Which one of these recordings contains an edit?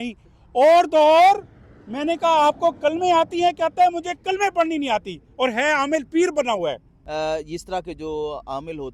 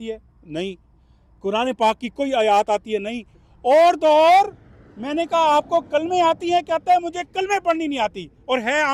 first; 1 cut; at 6.9 s

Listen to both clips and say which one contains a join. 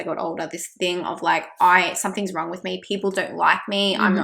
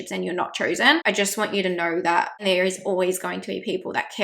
second; 2 cuts; at 1.0 s, 2.4 s

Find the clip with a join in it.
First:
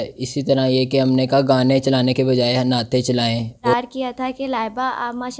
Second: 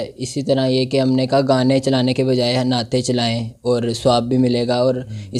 first; 1 cut; at 3.7 s

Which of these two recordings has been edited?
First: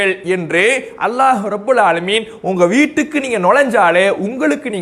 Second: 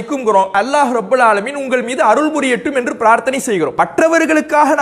second; 1 cut; at 3.7 s

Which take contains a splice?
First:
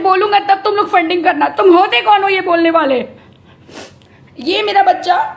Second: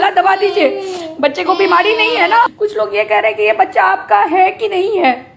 second; 1 cut; at 2.5 s

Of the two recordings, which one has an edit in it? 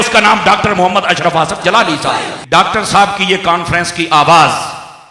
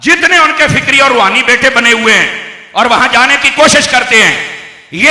first; 1 cut; at 2.3 s

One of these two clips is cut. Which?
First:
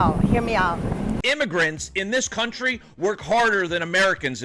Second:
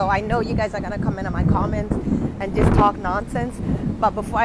first; 1 cut; at 1.2 s

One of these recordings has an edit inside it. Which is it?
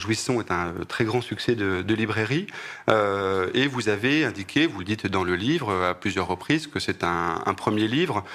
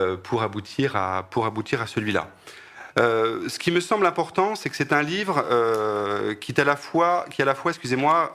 first; 1 cut; at 2.1 s

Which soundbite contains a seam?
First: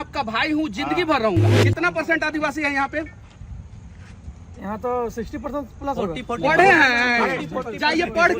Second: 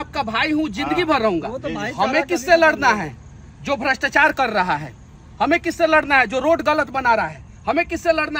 first; 1 cut; at 1.6 s

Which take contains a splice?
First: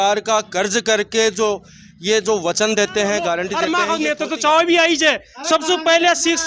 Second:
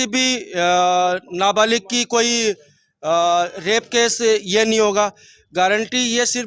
first; 1 cut; at 3.5 s

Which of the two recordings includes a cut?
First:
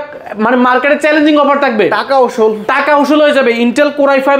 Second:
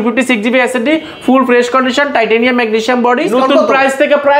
second; 1 cut; at 3.3 s

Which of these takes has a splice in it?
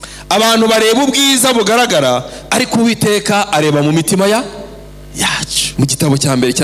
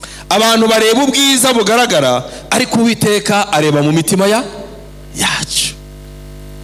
first; 1 cut; at 5.6 s

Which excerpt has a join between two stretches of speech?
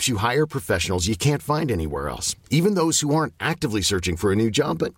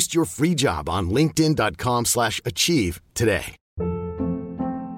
second; 1 cut; at 3.6 s

